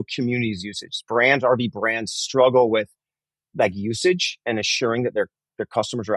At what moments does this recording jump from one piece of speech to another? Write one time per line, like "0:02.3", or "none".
none